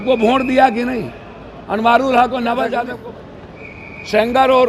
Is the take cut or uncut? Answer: cut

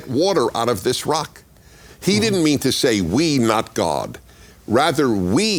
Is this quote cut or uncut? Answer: uncut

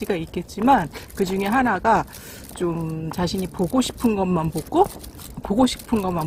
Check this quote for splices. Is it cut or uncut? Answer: uncut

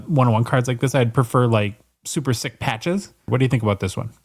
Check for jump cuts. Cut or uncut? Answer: cut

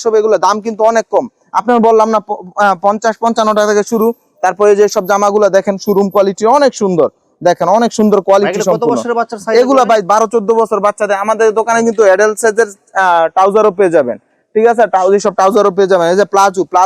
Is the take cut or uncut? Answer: uncut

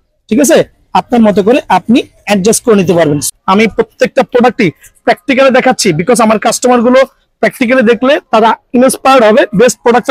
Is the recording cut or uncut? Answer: cut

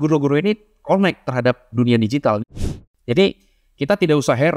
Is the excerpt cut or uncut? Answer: cut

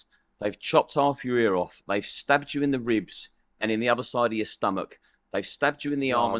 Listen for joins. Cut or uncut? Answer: uncut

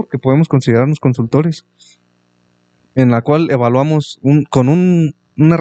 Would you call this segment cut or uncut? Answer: uncut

